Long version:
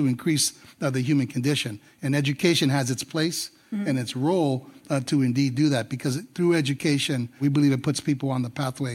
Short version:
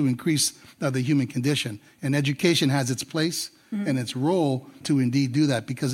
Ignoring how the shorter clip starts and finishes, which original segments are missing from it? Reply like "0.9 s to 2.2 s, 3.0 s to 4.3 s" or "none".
4.8 s to 5.0 s